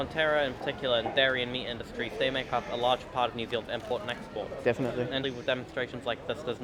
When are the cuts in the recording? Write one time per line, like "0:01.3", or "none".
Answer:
0:05.2